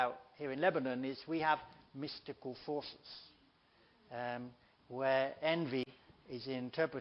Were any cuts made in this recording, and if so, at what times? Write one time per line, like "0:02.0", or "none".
0:01.5